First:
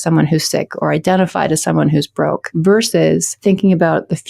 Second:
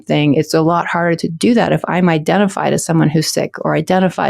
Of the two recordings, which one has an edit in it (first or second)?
first